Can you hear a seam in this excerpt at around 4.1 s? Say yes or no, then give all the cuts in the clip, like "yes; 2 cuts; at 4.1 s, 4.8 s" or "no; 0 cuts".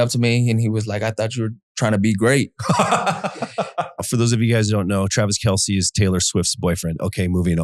yes; 1 cut; at 4.1 s